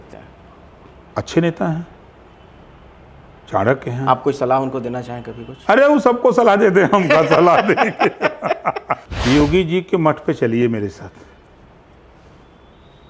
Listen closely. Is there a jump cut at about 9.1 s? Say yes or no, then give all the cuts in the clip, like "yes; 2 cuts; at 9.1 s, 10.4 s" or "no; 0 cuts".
yes; 1 cut; at 9.1 s